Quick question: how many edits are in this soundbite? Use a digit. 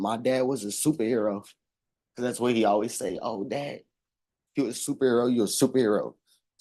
0